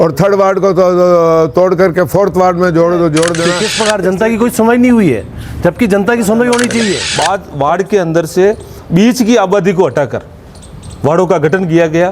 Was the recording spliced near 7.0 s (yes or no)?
yes